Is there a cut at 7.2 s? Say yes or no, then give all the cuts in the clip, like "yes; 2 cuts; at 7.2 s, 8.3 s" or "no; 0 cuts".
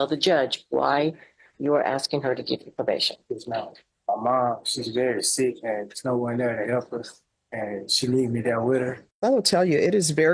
no; 2 cuts; at 3.9 s, 9.0 s